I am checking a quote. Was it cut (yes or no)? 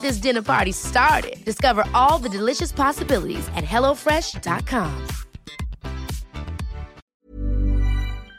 yes